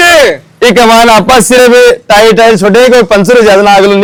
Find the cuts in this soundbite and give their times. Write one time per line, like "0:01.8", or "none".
none

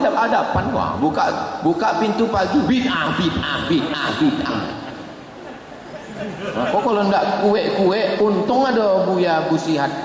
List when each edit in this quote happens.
none

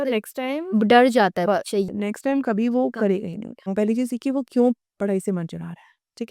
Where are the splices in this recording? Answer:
0:03.7

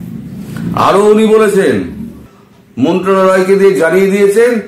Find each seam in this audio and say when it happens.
0:02.0

